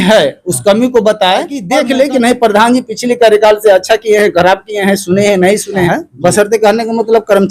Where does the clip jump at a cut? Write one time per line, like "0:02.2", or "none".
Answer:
0:01.6
0:05.8